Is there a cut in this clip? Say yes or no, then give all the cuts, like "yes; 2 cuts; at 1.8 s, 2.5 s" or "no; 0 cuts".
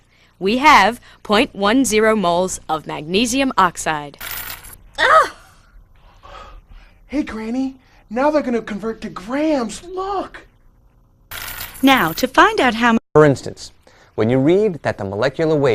yes; 1 cut; at 13.0 s